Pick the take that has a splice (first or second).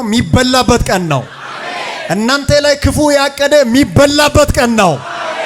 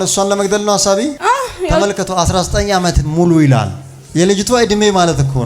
second